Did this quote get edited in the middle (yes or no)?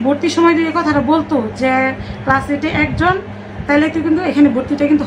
no